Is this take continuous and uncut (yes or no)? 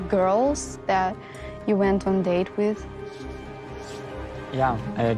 yes